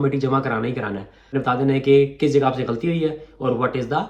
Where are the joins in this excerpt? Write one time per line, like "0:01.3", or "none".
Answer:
0:01.3